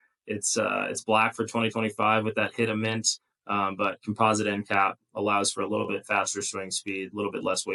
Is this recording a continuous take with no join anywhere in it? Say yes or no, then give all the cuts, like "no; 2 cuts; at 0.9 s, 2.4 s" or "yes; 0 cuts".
yes; 0 cuts